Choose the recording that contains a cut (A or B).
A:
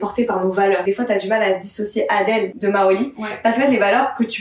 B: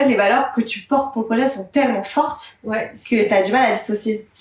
A